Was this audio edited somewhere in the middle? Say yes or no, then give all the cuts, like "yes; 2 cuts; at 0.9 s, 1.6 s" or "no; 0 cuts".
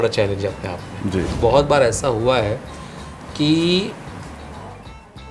yes; 1 cut; at 1.3 s